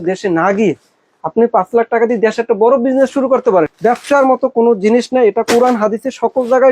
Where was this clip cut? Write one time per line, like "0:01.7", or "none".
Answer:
0:03.7